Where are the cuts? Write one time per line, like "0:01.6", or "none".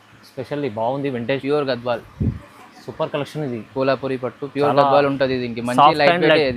0:01.4